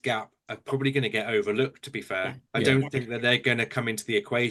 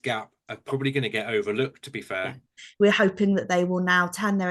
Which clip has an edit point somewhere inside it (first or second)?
second